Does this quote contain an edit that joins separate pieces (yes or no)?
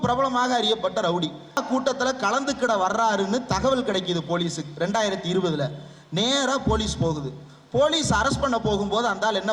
yes